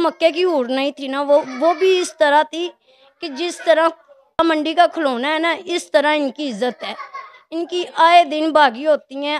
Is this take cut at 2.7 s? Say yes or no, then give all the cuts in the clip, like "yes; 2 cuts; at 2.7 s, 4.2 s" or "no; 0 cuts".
no; 1 cut; at 4.4 s